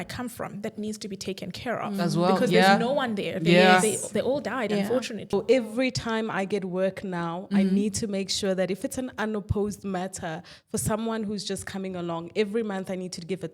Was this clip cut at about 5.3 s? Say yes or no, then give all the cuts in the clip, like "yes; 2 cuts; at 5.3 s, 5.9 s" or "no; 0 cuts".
yes; 1 cut; at 5.3 s